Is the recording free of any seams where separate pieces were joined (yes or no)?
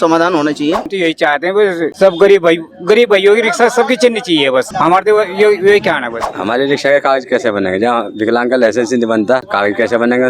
no